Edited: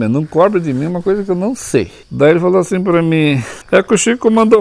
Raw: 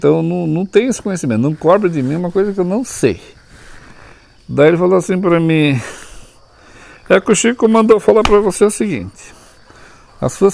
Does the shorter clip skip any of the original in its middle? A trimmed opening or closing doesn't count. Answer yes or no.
yes